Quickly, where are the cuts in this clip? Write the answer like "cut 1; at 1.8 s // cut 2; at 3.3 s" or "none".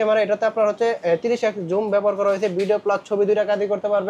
none